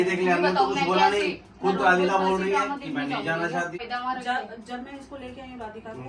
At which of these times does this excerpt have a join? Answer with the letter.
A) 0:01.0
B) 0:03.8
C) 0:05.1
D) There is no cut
B